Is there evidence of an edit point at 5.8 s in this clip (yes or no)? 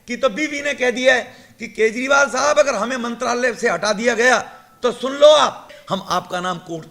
yes